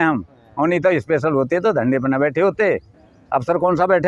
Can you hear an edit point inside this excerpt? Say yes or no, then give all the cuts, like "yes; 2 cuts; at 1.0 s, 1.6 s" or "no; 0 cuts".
no; 0 cuts